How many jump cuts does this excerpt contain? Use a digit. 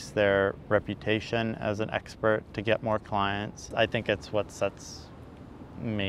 1